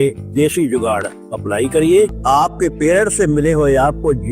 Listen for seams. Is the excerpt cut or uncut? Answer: cut